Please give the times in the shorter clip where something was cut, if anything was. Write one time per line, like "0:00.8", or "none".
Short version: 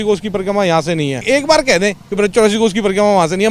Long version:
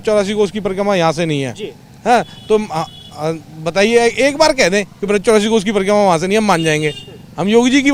0:01.2

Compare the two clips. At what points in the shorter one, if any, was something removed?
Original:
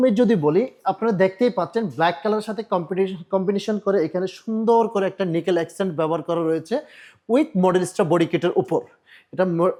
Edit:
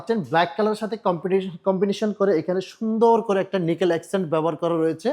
none

